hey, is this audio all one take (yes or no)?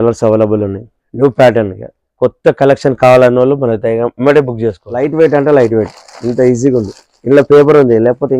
no